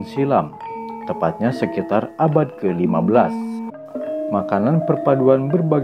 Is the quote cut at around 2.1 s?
no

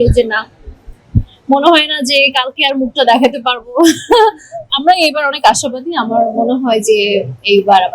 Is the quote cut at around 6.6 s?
no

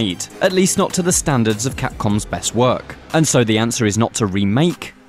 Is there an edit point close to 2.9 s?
yes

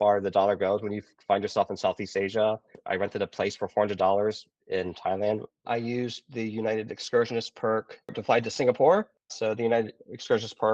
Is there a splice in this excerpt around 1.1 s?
no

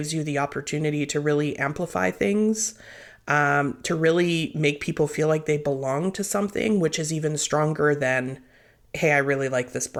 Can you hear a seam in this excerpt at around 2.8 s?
no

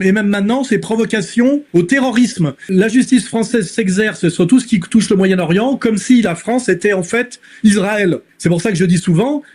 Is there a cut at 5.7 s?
no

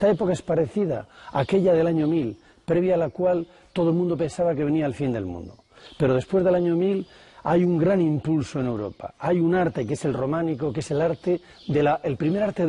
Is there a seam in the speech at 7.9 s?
yes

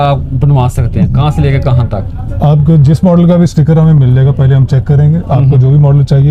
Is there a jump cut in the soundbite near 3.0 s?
no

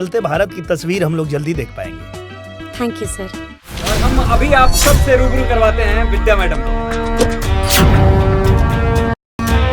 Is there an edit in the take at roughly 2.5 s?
no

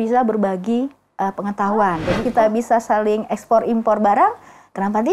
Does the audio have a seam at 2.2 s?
yes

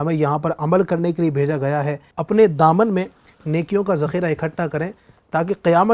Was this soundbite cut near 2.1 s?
yes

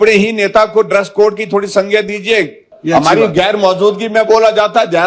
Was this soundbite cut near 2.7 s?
yes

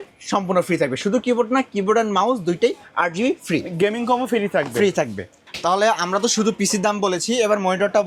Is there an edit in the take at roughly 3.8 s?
no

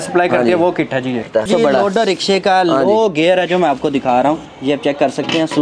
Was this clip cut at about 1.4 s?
yes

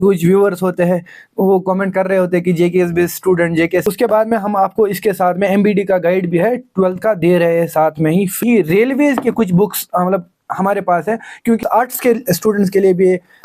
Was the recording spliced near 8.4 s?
yes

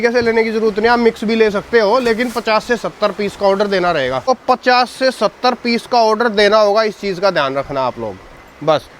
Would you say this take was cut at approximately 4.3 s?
yes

